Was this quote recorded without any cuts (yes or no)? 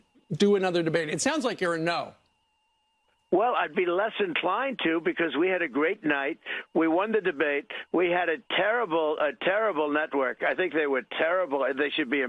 yes